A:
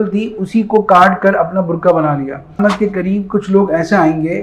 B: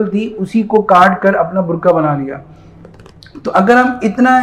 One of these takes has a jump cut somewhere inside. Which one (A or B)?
A